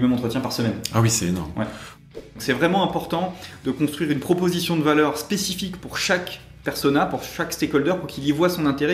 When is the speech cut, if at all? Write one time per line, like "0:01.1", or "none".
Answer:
0:02.0

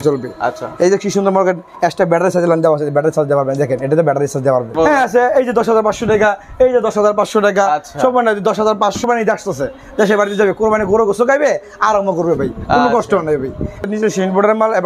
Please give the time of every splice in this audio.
0:04.8
0:09.0
0:13.8

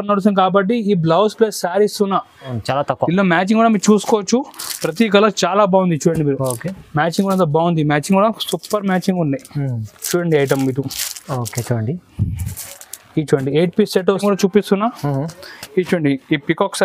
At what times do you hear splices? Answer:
0:02.6
0:14.2

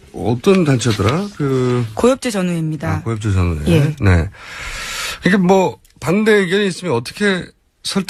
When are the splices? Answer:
none

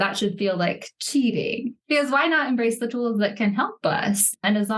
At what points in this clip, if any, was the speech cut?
none

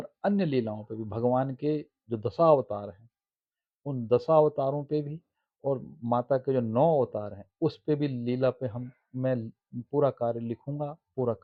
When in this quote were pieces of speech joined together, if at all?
none

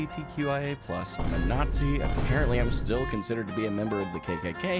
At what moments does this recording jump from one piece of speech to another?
none

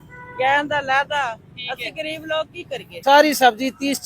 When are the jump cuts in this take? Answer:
0:02.9

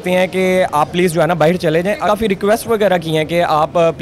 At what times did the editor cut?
0:02.1

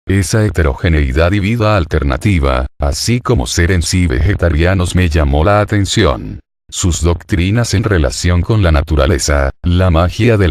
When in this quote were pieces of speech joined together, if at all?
0:03.4

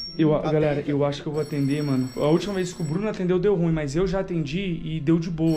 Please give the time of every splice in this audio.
0:02.1

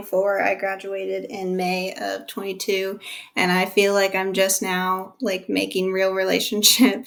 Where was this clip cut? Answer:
none

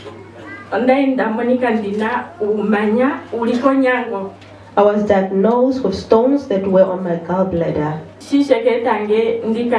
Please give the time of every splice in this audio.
0:08.1

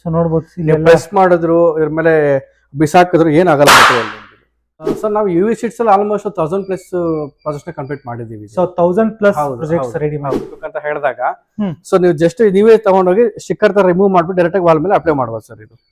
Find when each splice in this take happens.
0:04.9
0:10.4

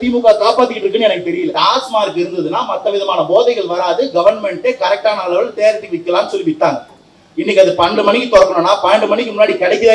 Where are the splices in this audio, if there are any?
0:01.5

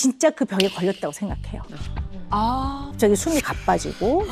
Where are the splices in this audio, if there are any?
0:02.8

